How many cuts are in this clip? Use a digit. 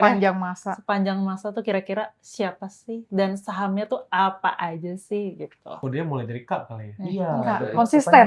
0